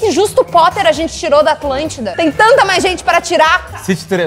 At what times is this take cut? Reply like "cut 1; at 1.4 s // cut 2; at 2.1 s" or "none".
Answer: cut 1; at 2.0 s

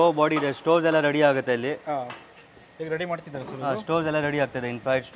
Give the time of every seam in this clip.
none

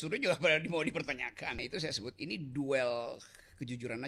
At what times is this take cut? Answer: cut 1; at 1.7 s

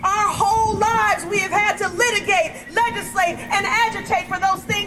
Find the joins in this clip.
none

